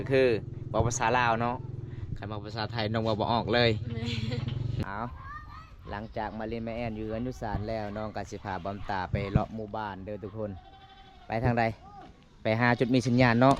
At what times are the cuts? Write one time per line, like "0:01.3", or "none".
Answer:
0:04.8

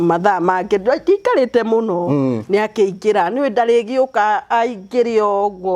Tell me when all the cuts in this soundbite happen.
none

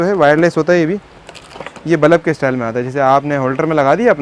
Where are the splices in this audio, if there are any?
none

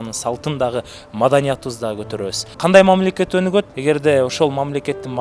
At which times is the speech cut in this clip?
0:02.4
0:03.7

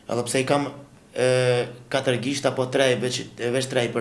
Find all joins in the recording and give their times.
none

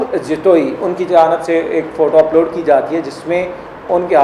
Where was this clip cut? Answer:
none

